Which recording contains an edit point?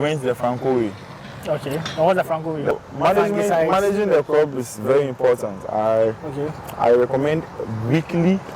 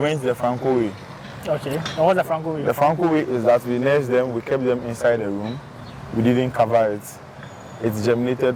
first; 1 cut; at 2.8 s

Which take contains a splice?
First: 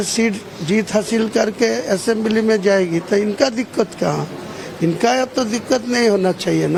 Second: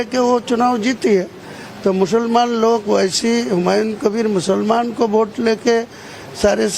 second; 1 cut; at 5.6 s

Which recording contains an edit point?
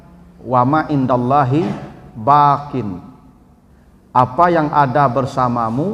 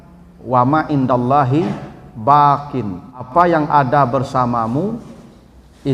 second; 1 cut; at 3.3 s

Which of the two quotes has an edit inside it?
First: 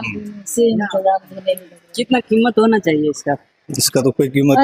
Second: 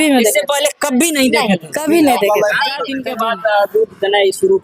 second; 1 cut; at 2.9 s

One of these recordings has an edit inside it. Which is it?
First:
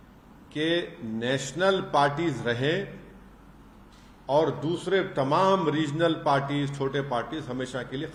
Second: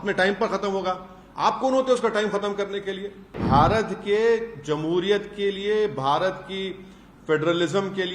second; 1 cut; at 3.3 s

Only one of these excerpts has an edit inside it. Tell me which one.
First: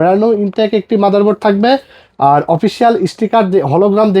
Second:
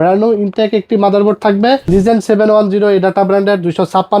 second; 1 cut; at 1.9 s

